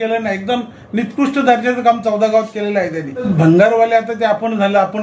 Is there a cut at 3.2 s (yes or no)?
yes